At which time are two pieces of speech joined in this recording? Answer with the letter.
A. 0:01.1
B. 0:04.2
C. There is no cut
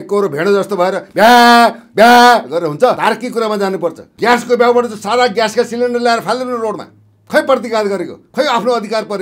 B